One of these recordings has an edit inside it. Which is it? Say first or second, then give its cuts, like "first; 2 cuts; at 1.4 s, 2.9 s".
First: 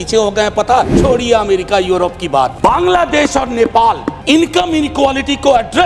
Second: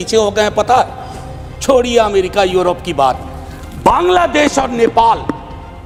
first; 3 cuts; at 0.9 s, 2.5 s, 4.1 s